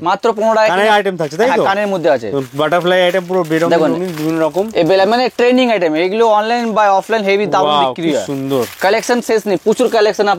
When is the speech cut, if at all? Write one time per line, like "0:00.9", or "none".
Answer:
none